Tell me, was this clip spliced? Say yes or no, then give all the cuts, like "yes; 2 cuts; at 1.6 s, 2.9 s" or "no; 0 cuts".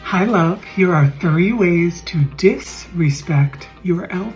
no; 0 cuts